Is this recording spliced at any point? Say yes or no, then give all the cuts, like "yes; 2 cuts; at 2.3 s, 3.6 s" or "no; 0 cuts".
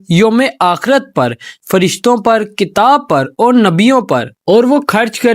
yes; 1 cut; at 4.3 s